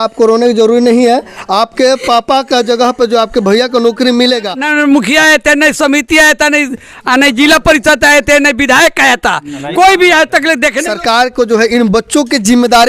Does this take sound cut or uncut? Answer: cut